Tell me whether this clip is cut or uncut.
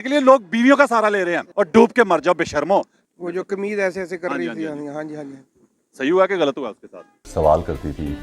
cut